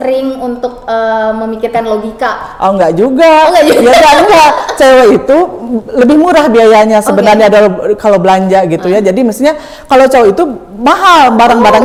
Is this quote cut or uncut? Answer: uncut